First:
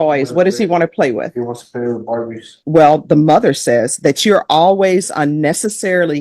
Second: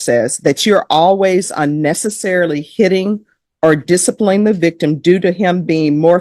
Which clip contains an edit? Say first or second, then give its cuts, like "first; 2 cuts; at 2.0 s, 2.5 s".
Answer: first; 1 cut; at 2.5 s